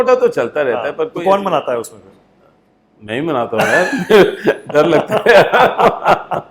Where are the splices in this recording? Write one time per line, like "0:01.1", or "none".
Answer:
none